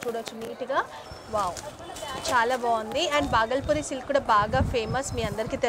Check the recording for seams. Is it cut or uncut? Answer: cut